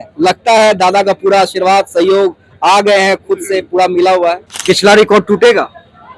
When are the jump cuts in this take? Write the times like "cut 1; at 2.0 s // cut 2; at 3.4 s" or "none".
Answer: cut 1; at 4.5 s